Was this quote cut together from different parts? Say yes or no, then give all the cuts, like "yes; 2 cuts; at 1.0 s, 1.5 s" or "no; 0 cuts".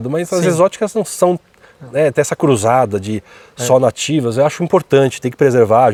no; 0 cuts